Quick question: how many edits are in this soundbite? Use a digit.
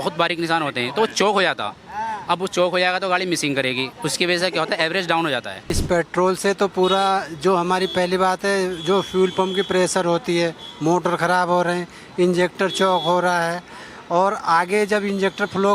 1